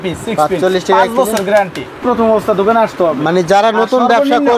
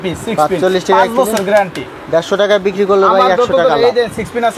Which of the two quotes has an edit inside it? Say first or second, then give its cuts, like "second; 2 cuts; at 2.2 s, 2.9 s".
first; 1 cut; at 2.0 s